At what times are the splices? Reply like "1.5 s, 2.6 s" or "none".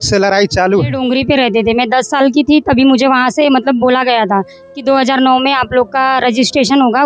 1.0 s